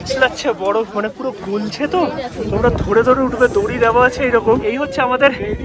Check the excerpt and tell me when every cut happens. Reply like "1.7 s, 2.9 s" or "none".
4.6 s